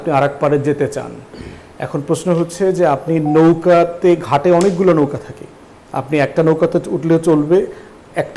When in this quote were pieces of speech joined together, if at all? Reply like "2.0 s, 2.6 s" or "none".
none

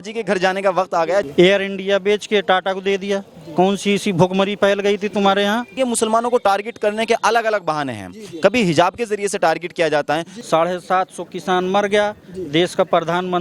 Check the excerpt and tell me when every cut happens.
1.3 s, 5.7 s, 10.3 s

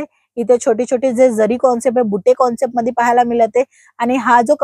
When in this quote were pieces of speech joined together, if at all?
none

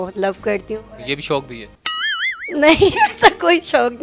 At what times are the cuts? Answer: none

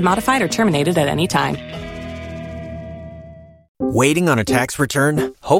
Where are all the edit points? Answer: 3.6 s

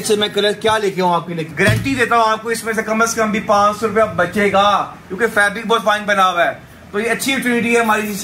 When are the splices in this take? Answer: 1.4 s

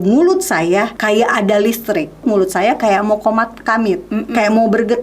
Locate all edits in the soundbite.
0.9 s, 2.2 s

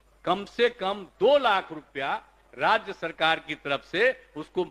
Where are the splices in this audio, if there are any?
none

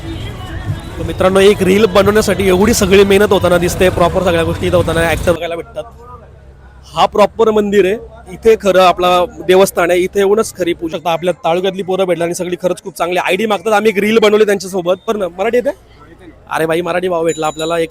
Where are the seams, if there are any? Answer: 5.4 s, 10.9 s, 15.1 s

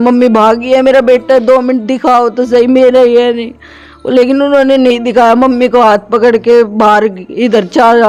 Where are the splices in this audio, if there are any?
none

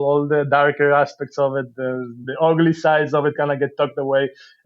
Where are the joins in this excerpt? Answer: 2.2 s

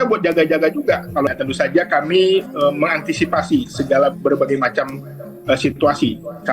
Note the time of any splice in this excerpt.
1.3 s

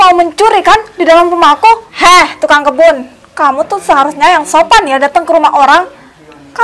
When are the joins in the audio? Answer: 1.9 s

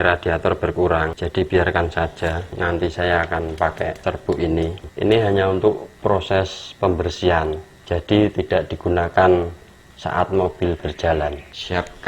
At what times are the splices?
4.8 s

